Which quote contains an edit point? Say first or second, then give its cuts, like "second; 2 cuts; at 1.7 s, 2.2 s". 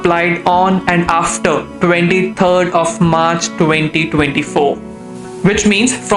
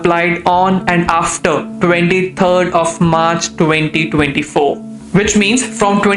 second; 1 cut; at 4.9 s